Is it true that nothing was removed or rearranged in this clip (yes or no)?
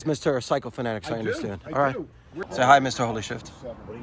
no